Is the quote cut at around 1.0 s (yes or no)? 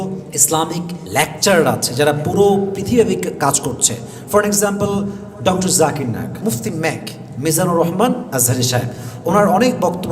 yes